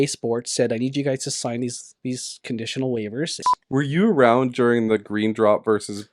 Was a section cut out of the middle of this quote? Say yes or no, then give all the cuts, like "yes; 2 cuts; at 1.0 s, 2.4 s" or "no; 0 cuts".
yes; 1 cut; at 3.4 s